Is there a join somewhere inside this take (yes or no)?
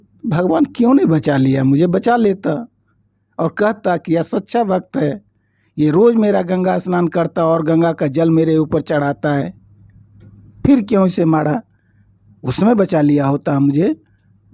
no